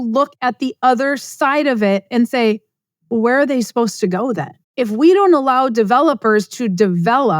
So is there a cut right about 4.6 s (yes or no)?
yes